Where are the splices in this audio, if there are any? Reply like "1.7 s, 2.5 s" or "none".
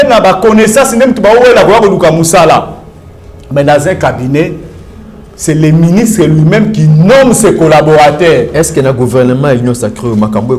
none